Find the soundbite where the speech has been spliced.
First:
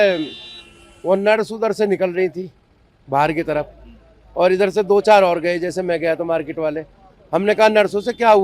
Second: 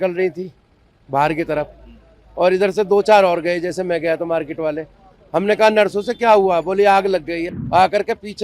second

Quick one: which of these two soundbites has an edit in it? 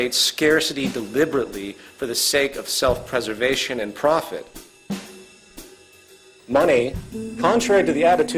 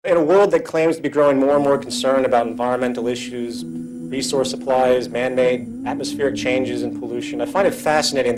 first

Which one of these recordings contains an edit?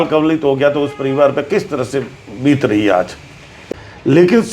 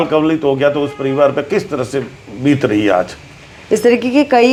first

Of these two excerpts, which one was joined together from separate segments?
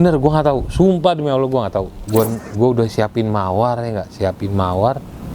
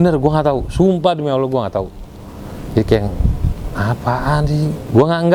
first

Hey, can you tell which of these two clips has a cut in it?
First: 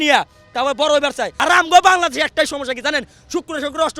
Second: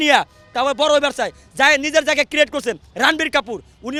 first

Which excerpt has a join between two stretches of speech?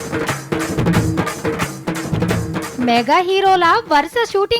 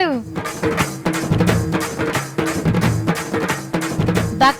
first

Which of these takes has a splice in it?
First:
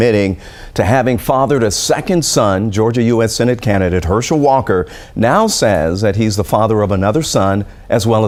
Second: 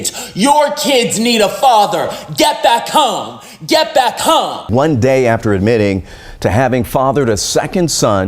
second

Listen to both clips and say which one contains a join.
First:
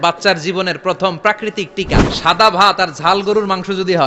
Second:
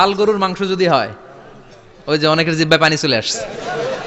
first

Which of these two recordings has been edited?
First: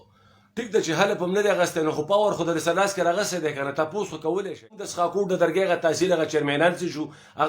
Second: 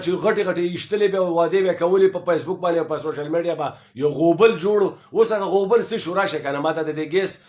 first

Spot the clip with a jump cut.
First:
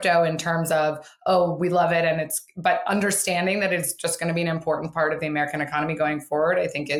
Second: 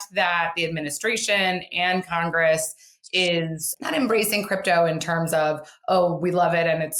second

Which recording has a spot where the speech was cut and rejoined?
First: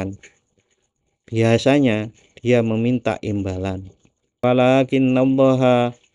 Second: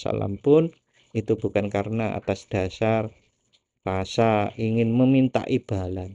first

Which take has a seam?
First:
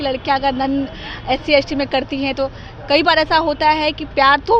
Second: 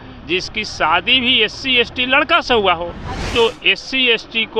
second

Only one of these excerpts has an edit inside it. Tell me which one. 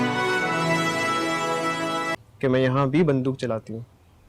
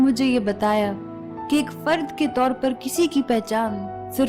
first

